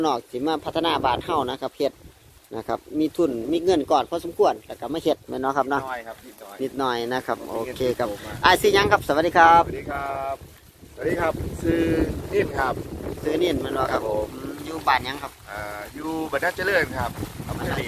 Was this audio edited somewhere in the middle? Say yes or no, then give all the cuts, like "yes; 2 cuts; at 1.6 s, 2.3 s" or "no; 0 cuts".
no; 0 cuts